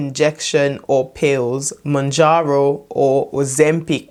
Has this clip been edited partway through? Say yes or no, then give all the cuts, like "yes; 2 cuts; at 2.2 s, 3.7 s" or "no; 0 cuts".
no; 0 cuts